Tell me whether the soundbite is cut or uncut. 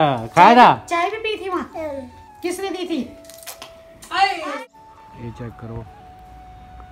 cut